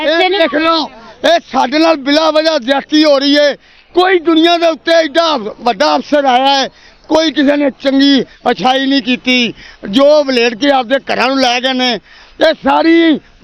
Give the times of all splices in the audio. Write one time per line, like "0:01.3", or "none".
none